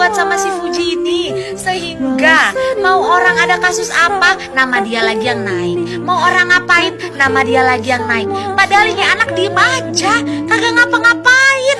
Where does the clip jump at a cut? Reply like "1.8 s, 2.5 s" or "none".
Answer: none